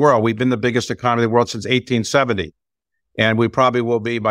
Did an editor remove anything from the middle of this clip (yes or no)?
no